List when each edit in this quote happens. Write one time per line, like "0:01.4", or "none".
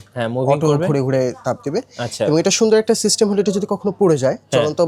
none